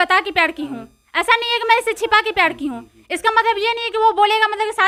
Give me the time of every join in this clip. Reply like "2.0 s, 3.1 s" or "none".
none